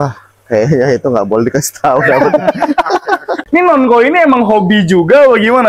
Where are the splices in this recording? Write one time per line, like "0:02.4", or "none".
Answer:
0:03.4